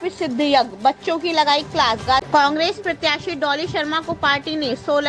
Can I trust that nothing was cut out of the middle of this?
no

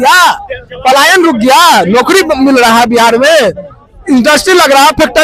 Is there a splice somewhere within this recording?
no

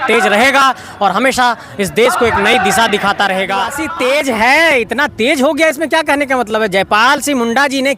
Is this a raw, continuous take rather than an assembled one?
no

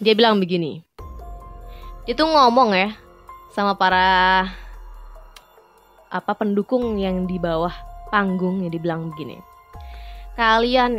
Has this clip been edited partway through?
no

